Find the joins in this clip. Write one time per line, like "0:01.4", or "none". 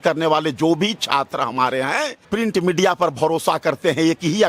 0:02.2